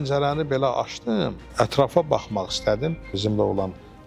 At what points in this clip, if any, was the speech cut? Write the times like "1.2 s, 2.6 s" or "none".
1.4 s, 3.1 s